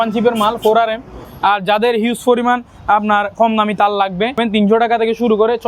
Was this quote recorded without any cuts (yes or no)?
no